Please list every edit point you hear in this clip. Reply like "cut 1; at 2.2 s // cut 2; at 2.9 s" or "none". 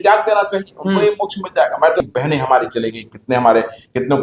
cut 1; at 2.0 s